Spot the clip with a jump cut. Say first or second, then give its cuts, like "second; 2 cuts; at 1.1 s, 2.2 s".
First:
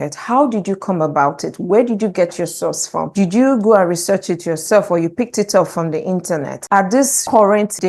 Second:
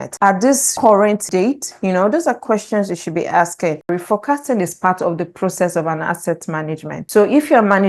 second; 1 cut; at 3.9 s